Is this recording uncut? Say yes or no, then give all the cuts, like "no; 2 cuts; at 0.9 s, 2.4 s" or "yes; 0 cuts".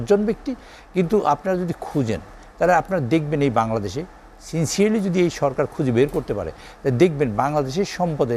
yes; 0 cuts